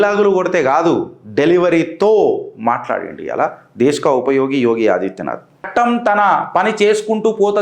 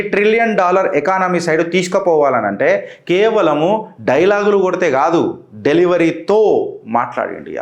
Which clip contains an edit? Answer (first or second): first